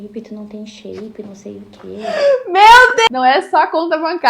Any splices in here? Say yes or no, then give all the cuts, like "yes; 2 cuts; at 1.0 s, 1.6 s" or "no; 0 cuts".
yes; 1 cut; at 3.1 s